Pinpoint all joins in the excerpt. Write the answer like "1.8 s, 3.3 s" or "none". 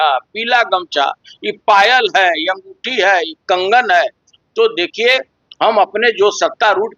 none

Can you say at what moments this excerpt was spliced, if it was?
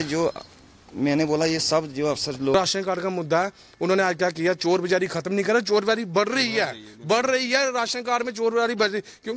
2.5 s

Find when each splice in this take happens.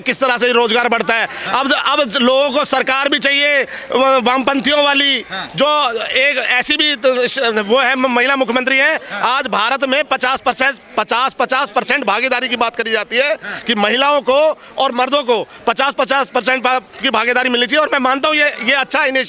none

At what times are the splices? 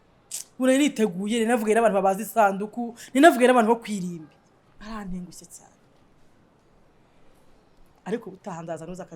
none

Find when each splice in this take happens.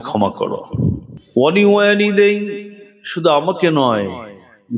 1.1 s

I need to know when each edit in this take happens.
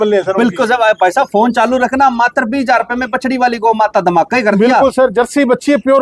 none

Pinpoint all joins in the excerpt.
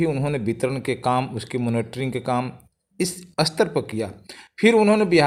none

